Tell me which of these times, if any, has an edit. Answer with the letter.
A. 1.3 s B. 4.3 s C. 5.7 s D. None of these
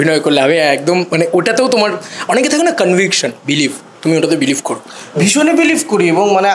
D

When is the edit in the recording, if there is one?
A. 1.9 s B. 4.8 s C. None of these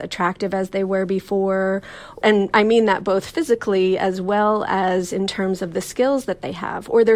C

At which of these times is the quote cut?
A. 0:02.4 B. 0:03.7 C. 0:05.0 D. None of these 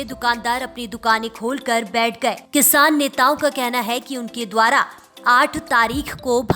A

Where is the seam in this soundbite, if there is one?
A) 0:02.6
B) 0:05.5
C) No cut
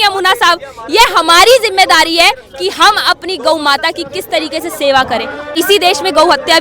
B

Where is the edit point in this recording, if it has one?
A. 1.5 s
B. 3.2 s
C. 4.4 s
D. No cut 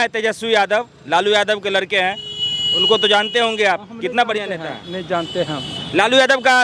D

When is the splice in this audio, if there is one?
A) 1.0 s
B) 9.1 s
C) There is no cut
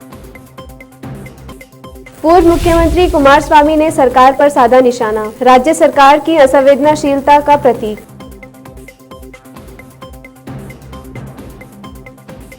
A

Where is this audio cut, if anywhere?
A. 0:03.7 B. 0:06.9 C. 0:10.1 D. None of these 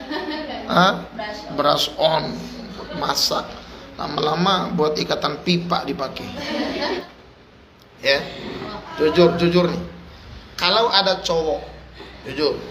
B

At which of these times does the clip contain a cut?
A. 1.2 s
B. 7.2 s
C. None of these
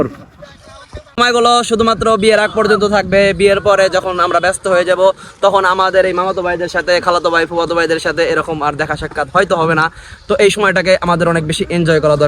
A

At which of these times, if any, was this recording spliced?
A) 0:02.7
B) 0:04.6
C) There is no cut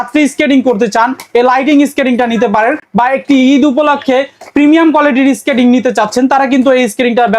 C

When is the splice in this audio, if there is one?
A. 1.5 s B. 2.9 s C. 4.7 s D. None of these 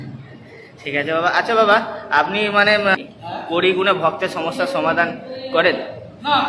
B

